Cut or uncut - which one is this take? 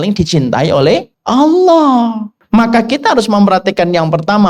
cut